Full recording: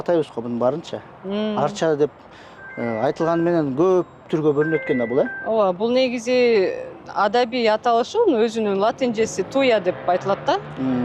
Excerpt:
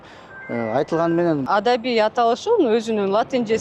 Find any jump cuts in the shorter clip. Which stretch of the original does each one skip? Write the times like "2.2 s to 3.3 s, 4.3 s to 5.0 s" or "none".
3.7 s to 7.1 s

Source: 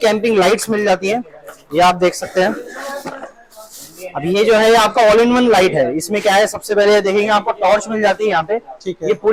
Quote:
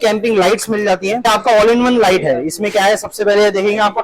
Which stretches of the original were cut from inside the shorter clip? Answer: 1.3 s to 4.8 s

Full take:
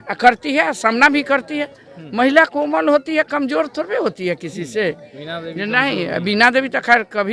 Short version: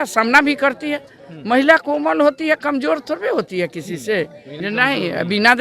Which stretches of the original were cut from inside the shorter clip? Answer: 5.2 s to 5.5 s

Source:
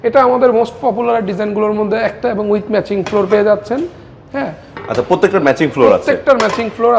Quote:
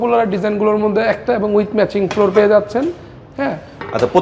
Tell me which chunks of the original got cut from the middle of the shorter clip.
none

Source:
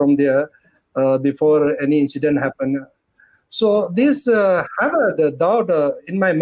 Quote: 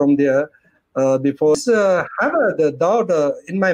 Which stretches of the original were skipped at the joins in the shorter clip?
1.6 s to 4.1 s

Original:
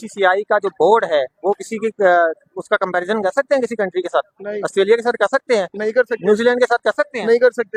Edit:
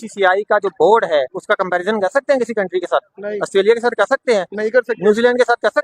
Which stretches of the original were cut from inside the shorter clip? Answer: 1.3 s to 2.5 s

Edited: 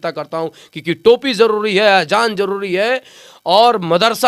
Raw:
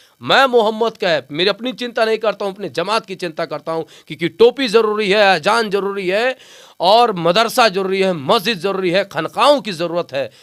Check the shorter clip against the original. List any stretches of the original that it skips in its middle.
none

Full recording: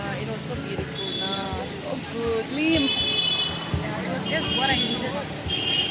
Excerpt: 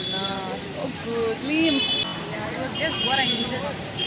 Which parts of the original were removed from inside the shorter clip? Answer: 3.2 s to 3.6 s

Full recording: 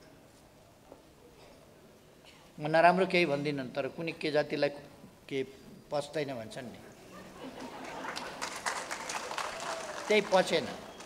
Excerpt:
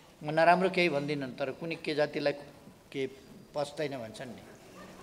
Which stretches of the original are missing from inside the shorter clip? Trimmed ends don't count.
none

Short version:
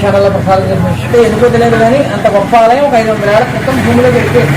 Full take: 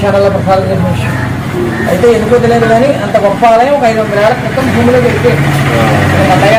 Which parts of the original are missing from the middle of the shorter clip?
1.1 s to 2.0 s

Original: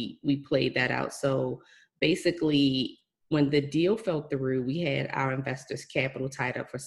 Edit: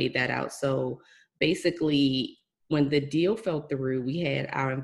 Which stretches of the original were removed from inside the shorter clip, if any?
none

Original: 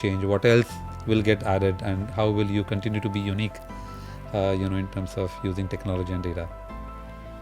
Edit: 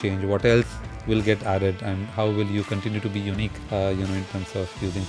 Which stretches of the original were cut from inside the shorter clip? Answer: 3.6 s to 4.2 s

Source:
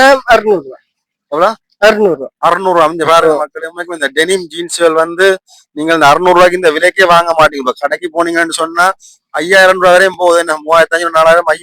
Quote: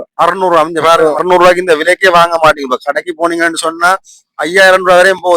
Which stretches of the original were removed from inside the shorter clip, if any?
3.5 s to 6.2 s

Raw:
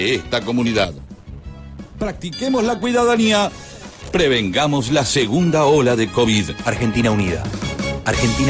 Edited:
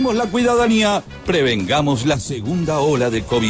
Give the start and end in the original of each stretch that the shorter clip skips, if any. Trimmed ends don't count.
3.6 s to 4.0 s

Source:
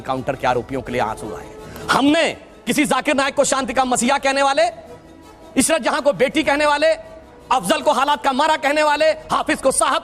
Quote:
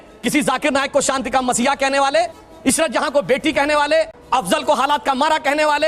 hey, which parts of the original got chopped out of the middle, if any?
4.9 s to 5.4 s, 7.1 s to 7.4 s

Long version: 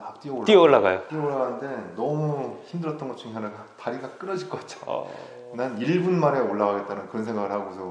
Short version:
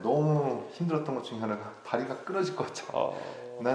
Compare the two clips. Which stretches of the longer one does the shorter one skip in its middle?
none

